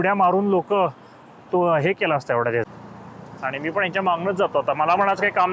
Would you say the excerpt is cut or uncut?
cut